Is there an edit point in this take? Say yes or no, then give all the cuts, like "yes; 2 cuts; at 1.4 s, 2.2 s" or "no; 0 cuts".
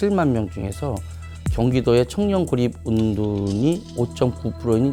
no; 0 cuts